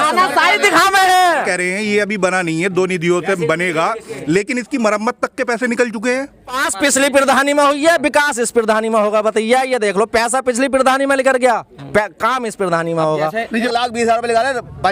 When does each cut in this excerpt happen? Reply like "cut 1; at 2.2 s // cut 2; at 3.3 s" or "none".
cut 1; at 1.3 s // cut 2; at 6.7 s // cut 3; at 13.6 s